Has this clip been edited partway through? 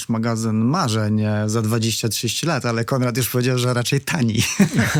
no; 0 cuts

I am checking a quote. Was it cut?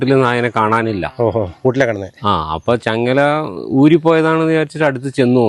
no; 0 cuts

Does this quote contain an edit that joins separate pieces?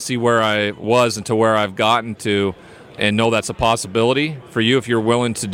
yes; 2 cuts; at 0.8 s, 2.8 s

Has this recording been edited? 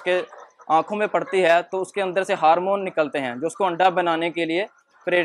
no; 0 cuts

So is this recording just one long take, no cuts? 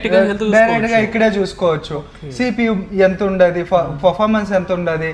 yes; 0 cuts

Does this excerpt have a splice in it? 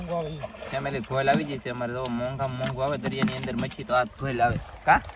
no; 0 cuts

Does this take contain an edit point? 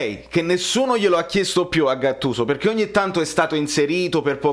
no; 0 cuts

